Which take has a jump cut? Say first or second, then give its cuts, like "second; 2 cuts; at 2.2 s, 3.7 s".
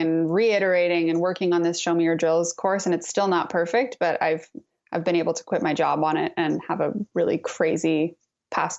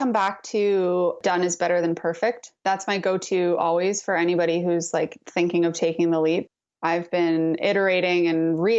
second; 3 cuts; at 1.2 s, 2.6 s, 6.5 s